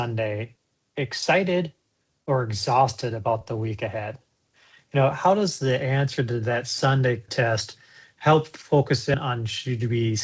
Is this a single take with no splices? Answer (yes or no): no